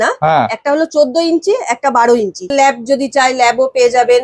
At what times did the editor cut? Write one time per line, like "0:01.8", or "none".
0:02.5